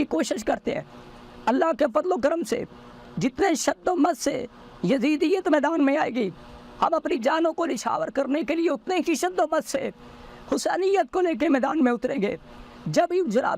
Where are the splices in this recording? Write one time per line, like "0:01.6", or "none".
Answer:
none